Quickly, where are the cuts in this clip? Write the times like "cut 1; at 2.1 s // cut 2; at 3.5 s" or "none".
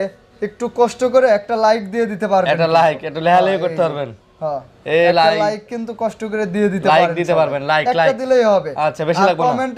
none